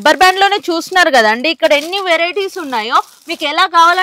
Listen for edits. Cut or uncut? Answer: uncut